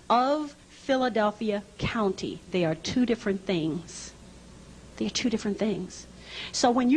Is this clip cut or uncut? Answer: cut